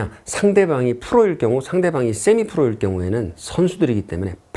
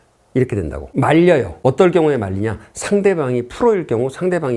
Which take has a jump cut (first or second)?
second